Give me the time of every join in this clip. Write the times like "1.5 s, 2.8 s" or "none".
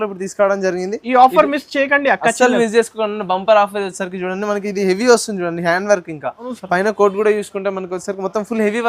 6.6 s